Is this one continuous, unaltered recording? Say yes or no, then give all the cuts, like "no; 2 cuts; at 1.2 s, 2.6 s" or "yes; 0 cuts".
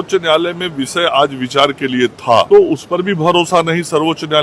no; 1 cut; at 2.5 s